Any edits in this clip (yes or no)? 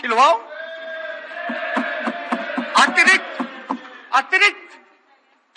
no